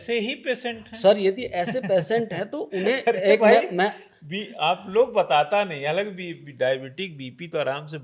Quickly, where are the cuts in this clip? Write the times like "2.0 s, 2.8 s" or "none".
none